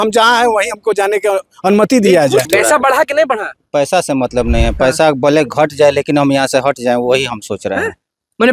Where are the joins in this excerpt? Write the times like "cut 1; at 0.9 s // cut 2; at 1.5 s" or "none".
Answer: cut 1; at 2.5 s